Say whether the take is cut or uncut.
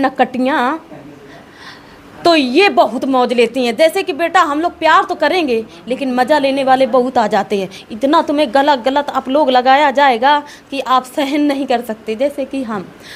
uncut